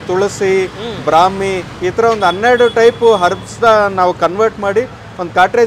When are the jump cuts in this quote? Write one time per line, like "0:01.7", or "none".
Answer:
none